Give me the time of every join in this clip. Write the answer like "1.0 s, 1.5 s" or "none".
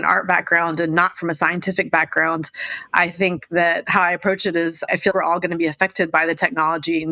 none